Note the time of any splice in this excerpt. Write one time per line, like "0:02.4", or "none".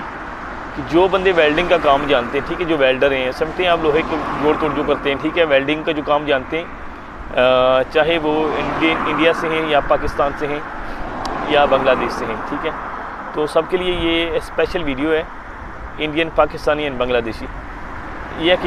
none